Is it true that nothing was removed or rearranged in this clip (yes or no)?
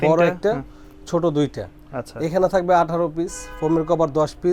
yes